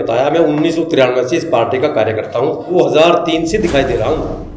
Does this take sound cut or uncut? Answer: cut